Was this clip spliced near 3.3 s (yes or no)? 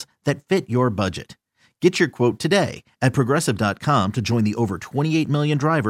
no